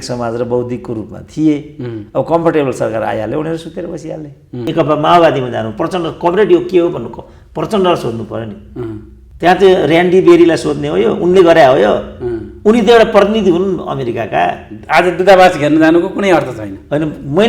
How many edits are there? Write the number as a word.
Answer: one